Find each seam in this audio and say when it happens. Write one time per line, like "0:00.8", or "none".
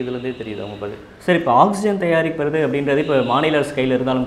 none